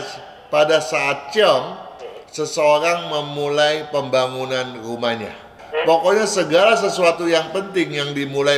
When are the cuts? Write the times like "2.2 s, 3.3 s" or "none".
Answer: 5.6 s